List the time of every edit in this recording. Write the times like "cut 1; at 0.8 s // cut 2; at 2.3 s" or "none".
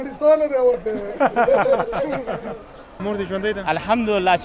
cut 1; at 2.9 s